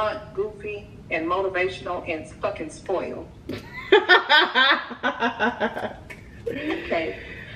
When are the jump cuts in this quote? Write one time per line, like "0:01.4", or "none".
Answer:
none